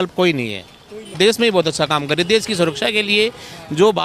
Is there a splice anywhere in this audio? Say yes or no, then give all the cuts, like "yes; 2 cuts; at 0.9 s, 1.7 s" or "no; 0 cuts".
yes; 1 cut; at 1.2 s